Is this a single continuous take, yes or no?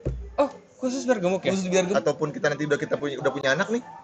no